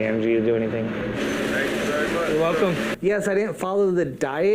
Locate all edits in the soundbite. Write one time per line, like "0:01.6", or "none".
0:02.9